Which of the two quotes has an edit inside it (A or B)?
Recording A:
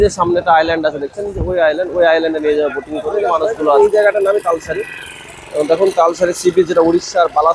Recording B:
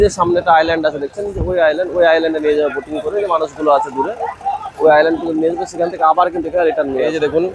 A